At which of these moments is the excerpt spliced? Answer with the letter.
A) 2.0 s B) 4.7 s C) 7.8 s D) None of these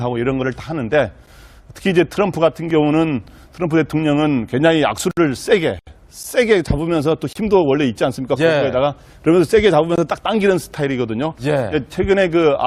C